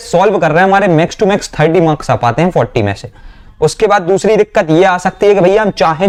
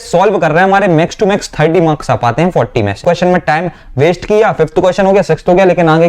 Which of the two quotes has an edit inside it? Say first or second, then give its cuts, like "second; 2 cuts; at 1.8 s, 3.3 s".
second; 1 cut; at 3.0 s